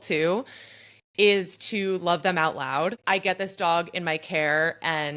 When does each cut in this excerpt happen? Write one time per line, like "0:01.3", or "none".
0:03.0